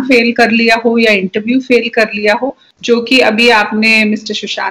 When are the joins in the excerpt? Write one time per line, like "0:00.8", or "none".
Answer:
0:02.7